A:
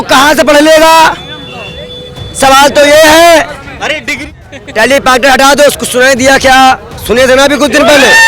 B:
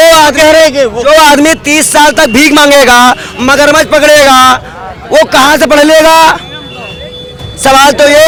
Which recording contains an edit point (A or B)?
A